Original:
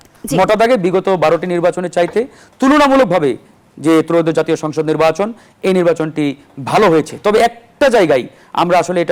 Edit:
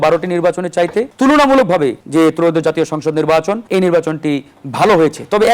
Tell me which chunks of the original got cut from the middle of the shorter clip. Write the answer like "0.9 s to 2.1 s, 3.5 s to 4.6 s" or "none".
2.3 s to 2.5 s, 3.4 s to 3.7 s, 5.3 s to 5.6 s